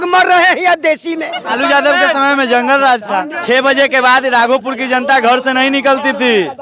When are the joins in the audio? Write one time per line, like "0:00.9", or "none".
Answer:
0:01.5
0:03.3